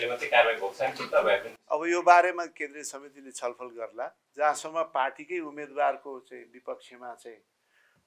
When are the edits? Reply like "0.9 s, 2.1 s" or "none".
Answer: none